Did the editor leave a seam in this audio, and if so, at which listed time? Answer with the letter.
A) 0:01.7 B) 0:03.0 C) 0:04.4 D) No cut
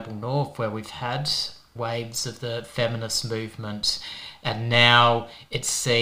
A